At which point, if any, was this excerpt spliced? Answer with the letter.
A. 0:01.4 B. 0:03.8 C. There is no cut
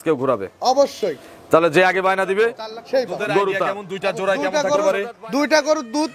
B